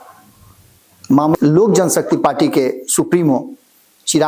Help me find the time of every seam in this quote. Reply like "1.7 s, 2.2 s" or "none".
1.4 s